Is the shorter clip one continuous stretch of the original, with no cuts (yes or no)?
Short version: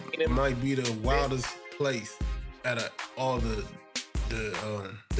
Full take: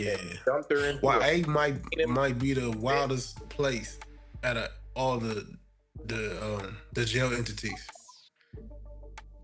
yes